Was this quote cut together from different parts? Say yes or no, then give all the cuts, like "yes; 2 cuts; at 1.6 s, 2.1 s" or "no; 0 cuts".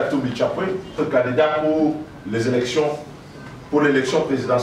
yes; 1 cut; at 1.0 s